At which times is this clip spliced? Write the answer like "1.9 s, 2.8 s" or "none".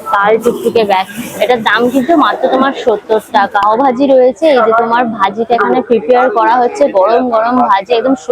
3.6 s